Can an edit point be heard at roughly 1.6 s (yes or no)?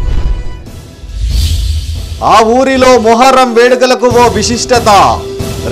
yes